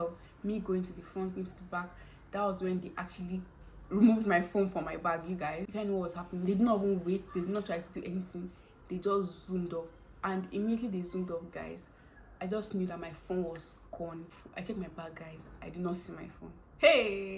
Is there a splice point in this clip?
yes; 2 cuts; at 5.6 s, 14.3 s

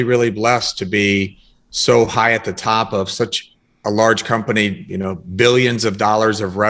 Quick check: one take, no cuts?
yes; 0 cuts

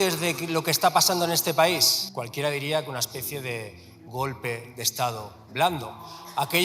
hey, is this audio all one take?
no; 1 cut; at 2.0 s

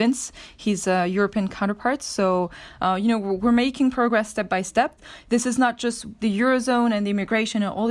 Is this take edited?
no; 0 cuts

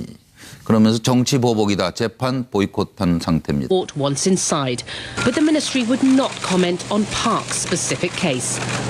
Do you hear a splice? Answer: no; 0 cuts

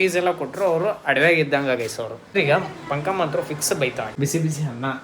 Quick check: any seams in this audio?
yes; 2 cuts; at 2.4 s, 4.1 s

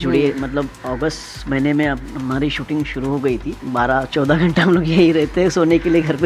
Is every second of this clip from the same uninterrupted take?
no; 1 cut; at 3.5 s

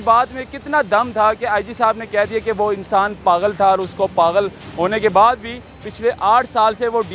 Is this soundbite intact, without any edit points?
yes; 0 cuts

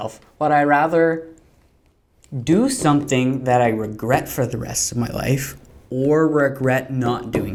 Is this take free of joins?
yes; 0 cuts

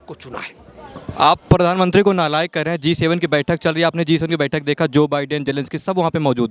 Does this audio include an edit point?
no; 0 cuts

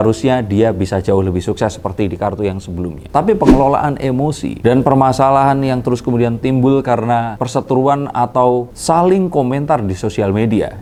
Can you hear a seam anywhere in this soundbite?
no; 0 cuts

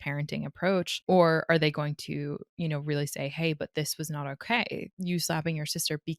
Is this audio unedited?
no; 1 cut; at 0.9 s

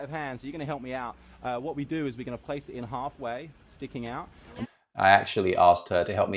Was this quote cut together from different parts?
no; 0 cuts

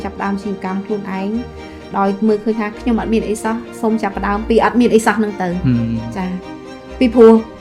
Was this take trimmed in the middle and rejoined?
no; 0 cuts

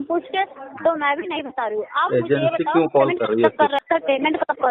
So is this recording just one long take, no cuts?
no; 1 cut; at 3.8 s

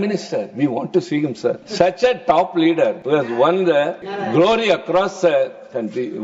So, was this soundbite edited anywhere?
yes; 3 cuts; at 1.7 s, 3.0 s, 4.1 s

